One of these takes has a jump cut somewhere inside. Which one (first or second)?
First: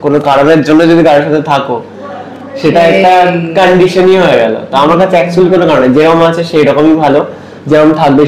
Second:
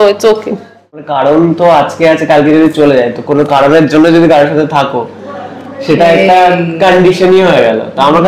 second